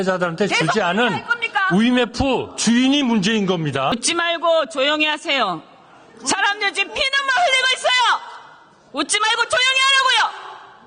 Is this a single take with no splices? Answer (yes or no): no